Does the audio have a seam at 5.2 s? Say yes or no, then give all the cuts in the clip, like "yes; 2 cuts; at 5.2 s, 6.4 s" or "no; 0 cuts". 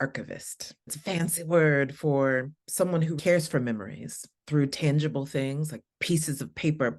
no; 2 cuts; at 0.9 s, 3.2 s